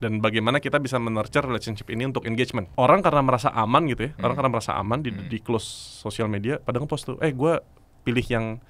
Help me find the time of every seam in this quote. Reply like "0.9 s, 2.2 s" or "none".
2.7 s

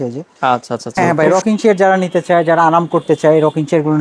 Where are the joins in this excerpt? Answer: 1.2 s

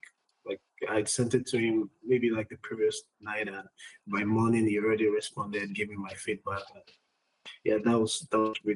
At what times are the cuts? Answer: none

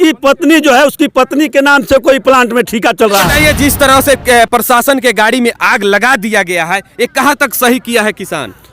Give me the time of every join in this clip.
3.3 s

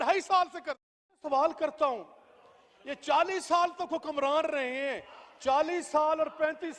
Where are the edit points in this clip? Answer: 1.2 s

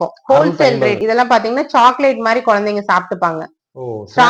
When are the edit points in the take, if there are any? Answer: 1.0 s

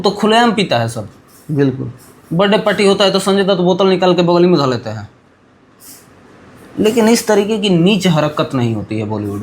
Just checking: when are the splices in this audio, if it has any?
none

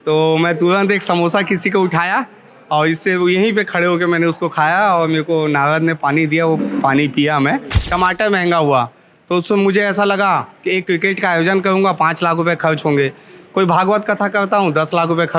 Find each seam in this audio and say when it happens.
7.8 s

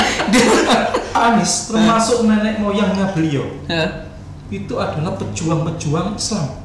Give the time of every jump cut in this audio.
1.1 s

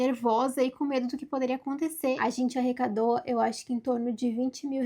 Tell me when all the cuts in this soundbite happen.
2.2 s

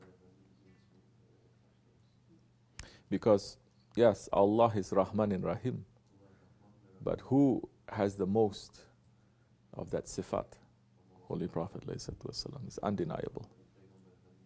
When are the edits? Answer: none

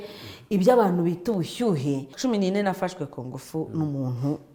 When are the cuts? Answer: 2.1 s

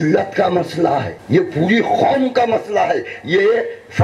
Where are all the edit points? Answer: 1.1 s

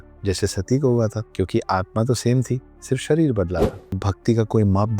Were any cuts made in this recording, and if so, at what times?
1.2 s, 3.8 s

